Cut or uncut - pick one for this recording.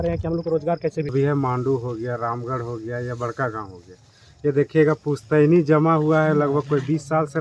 cut